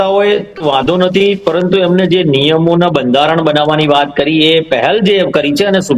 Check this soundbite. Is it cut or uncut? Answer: uncut